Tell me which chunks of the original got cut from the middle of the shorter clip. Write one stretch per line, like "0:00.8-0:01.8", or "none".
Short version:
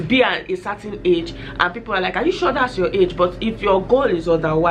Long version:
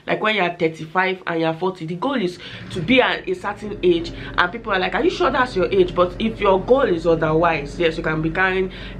none